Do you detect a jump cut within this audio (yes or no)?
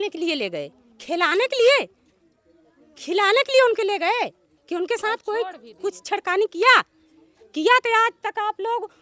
no